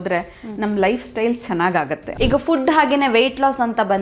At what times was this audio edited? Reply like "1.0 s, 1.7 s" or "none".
2.0 s